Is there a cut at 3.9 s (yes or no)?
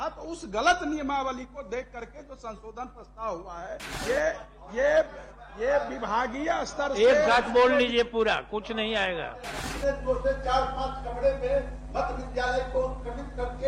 yes